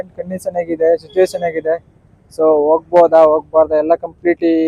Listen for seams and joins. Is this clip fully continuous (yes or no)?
yes